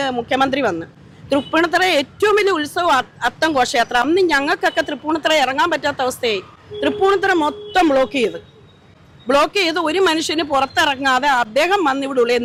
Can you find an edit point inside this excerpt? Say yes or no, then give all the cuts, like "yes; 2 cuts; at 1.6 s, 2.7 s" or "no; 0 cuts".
no; 0 cuts